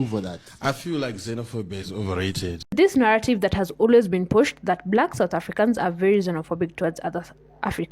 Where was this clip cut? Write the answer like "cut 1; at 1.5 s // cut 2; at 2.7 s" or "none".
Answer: cut 1; at 2.7 s